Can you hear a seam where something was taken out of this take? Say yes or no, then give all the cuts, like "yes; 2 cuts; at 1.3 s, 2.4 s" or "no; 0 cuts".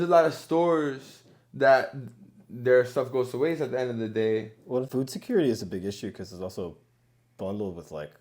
yes; 1 cut; at 4.9 s